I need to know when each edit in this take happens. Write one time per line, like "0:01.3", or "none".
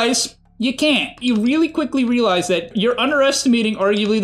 0:01.2
0:02.7

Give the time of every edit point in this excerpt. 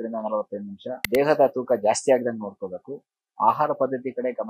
0:00.9

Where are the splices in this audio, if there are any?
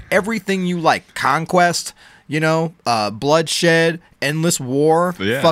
none

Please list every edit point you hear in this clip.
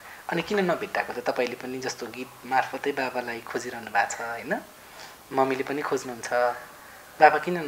none

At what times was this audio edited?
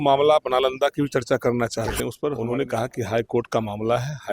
0:02.4

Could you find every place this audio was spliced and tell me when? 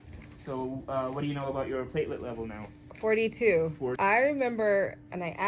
0:04.0

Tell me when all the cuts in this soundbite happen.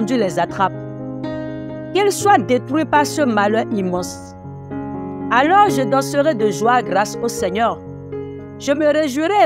none

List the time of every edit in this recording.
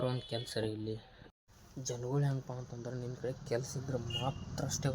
0:01.3

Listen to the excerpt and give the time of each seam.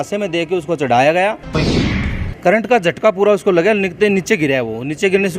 0:01.7

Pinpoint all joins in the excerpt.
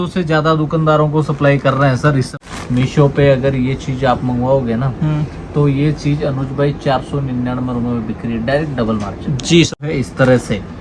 0:02.3
0:09.8

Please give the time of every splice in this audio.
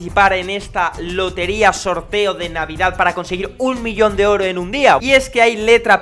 0:05.0

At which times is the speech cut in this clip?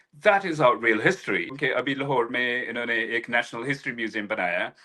0:01.6

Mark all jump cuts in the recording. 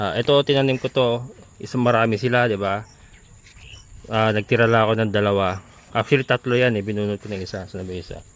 none

